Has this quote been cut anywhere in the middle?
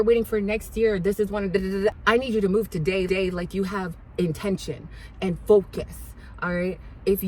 no; 0 cuts

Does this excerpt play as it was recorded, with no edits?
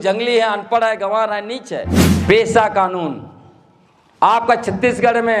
no; 1 cut; at 2.0 s

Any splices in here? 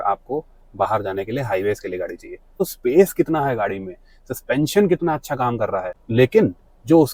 yes; 2 cuts; at 2.6 s, 6.0 s

